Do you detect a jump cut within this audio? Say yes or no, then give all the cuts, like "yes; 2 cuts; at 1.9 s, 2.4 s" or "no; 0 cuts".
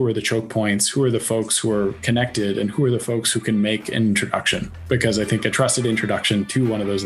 no; 0 cuts